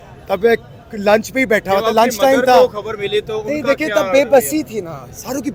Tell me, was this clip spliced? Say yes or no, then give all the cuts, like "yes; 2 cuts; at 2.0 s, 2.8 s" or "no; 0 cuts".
no; 0 cuts